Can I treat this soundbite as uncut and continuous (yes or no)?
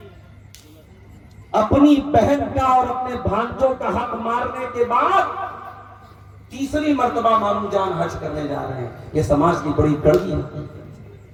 yes